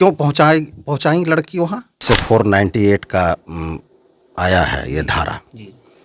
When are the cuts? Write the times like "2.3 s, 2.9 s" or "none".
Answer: 2.0 s